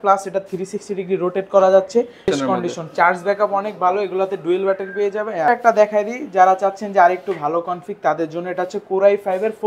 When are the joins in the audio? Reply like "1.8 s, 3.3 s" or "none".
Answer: 2.3 s, 5.5 s